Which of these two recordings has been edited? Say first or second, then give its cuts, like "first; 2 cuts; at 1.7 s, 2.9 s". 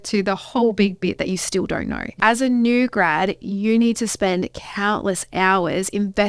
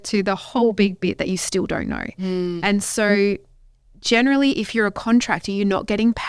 first; 1 cut; at 2.1 s